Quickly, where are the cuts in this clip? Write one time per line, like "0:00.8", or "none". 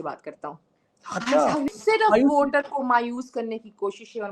0:01.7